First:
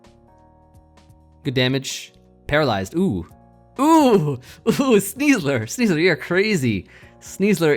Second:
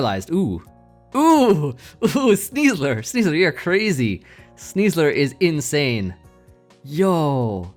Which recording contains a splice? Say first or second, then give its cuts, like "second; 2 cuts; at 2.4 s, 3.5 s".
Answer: first; 1 cut; at 1.4 s